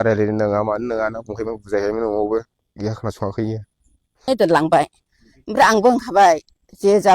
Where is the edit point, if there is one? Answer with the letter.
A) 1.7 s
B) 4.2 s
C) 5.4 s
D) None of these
B